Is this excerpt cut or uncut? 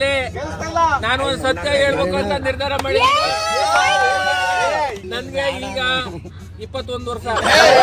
cut